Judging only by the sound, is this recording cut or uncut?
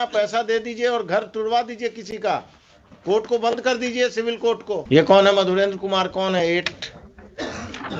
uncut